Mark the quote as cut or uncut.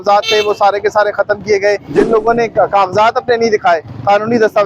cut